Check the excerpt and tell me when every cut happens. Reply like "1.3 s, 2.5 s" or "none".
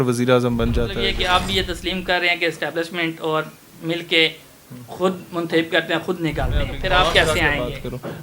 1.0 s, 6.8 s